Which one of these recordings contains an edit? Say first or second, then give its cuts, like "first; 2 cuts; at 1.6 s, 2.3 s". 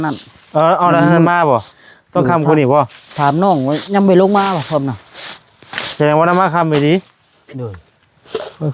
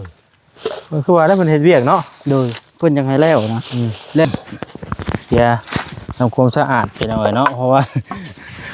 second; 1 cut; at 4.2 s